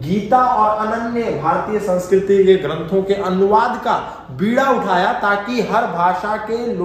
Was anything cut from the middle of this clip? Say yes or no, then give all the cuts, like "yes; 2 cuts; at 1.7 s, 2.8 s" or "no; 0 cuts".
no; 0 cuts